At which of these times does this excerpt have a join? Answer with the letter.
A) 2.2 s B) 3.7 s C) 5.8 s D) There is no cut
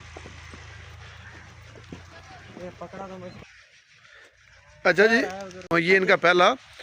C